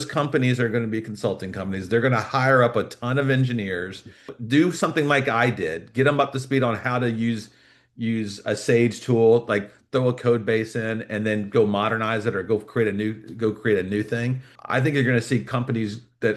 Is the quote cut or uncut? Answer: cut